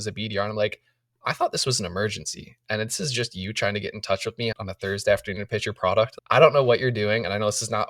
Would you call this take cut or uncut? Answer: uncut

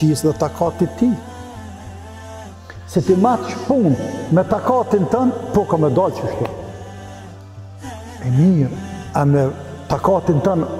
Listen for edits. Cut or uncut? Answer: cut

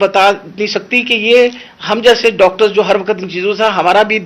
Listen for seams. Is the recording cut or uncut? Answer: uncut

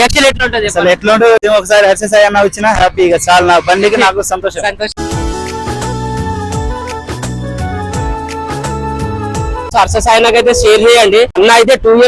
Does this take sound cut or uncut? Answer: cut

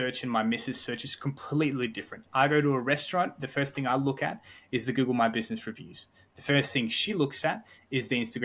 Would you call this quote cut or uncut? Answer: uncut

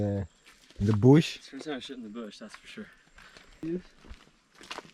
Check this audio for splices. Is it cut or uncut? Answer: cut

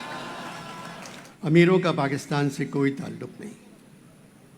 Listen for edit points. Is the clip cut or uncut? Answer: cut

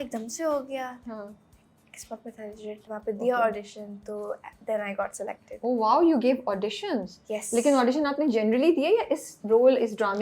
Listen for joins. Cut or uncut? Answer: uncut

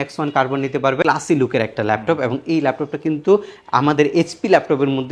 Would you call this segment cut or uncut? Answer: cut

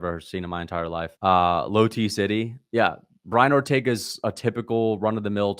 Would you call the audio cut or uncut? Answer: uncut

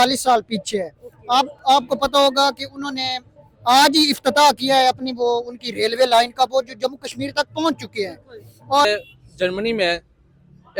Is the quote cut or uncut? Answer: cut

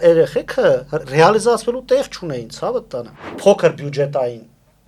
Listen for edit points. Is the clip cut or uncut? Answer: cut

